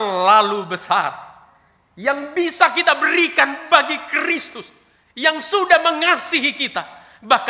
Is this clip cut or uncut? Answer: uncut